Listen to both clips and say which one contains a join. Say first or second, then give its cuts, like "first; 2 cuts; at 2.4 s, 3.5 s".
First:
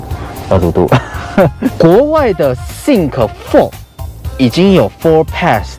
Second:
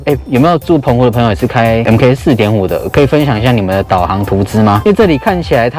first; 1 cut; at 1.7 s